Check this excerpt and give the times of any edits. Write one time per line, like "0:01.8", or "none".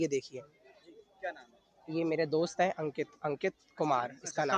none